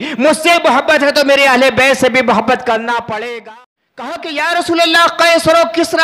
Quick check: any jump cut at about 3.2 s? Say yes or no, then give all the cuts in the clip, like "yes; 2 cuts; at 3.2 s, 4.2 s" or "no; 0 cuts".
yes; 1 cut; at 3.2 s